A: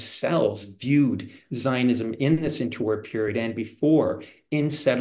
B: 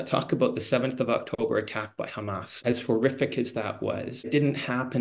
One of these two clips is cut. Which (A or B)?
B